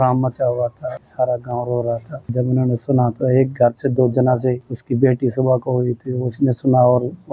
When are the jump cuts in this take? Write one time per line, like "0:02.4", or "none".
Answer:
0:01.0
0:02.2
0:04.7

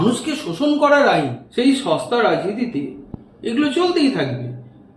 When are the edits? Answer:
0:01.4

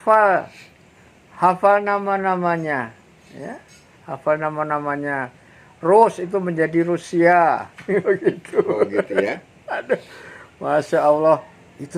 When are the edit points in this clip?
none

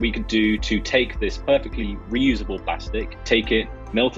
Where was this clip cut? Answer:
0:03.1

